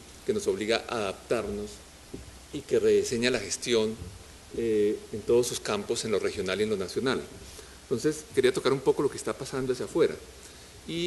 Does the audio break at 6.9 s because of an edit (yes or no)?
yes